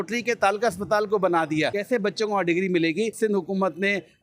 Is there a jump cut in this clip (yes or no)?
yes